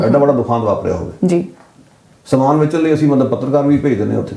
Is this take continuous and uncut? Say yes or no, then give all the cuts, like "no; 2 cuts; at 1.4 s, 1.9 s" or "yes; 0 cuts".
yes; 0 cuts